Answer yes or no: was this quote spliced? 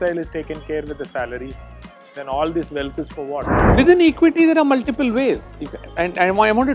yes